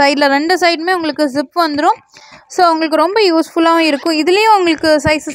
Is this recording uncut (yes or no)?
yes